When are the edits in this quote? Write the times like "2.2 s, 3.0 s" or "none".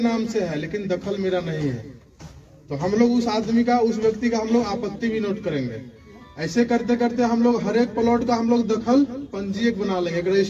none